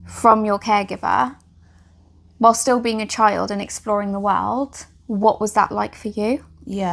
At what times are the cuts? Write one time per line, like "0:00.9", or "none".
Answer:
none